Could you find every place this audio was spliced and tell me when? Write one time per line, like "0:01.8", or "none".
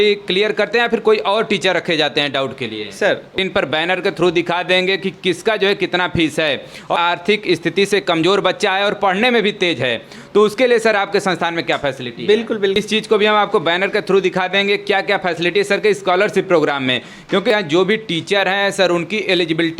0:03.4
0:06.9
0:12.8
0:17.5